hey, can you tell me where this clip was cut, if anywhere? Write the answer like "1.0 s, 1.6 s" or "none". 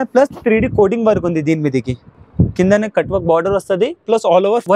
none